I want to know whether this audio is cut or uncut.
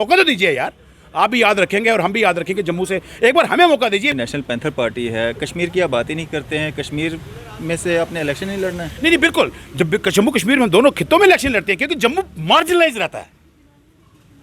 cut